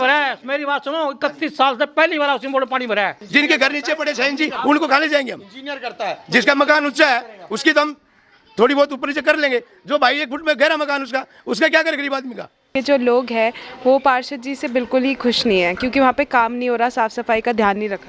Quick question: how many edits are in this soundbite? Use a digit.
2